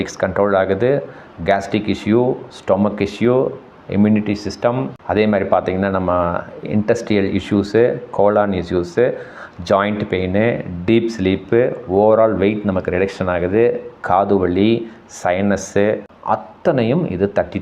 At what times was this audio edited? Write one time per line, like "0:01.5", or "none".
0:16.1